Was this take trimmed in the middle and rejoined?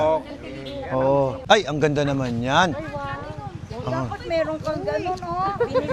yes; 1 cut; at 1.4 s

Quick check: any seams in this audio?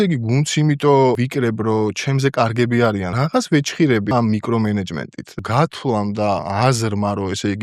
yes; 5 cuts; at 1.2 s, 3.1 s, 4.1 s, 5.4 s, 6.4 s

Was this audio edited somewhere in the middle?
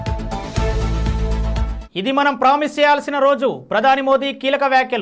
no; 0 cuts

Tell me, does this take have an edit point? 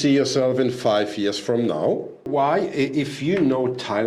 yes; 1 cut; at 2.3 s

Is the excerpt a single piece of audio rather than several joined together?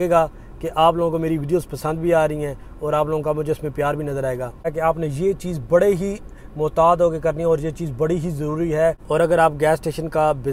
no; 2 cuts; at 4.7 s, 9.0 s

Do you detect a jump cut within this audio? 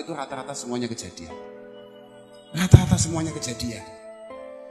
yes; 1 cut; at 3.8 s

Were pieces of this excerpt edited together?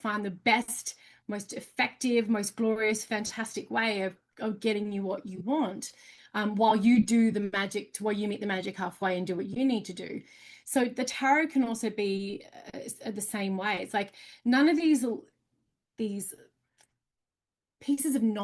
no; 0 cuts

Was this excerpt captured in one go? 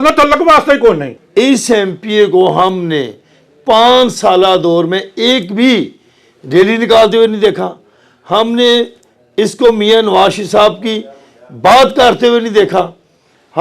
no; 1 cut; at 1.1 s

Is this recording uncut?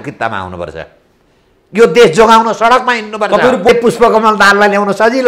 no; 1 cut; at 3.7 s

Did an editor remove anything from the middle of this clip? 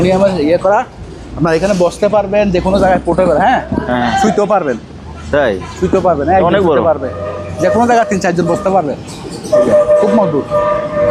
no; 0 cuts

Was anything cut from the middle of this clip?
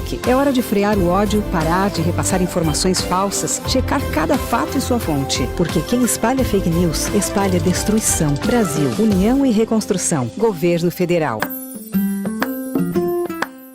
yes; 1 cut; at 11.4 s

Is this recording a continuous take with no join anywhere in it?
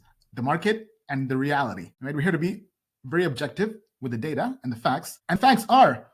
no; 2 cuts; at 1.9 s, 5.1 s

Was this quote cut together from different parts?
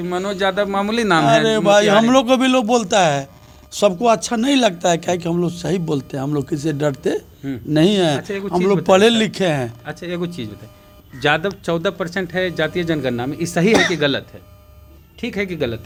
no; 0 cuts

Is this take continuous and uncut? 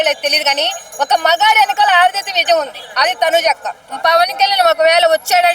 no; 1 cut; at 3.9 s

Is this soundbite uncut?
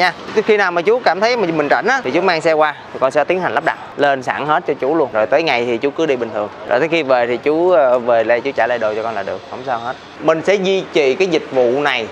no; 4 cuts; at 2.0 s, 5.1 s, 6.6 s, 10.1 s

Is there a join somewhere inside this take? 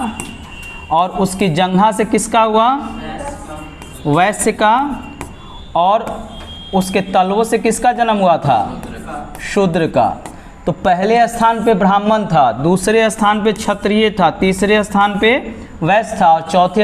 no; 0 cuts

